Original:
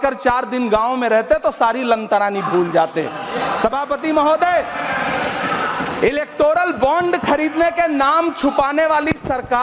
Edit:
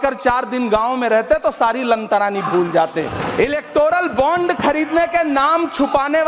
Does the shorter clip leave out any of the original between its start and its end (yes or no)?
yes